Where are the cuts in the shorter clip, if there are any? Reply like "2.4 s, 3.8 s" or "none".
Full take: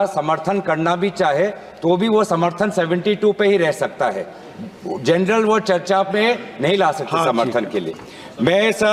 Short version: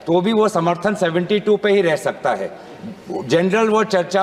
none